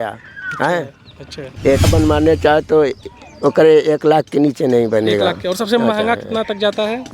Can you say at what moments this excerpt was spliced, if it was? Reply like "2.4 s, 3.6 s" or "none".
1.9 s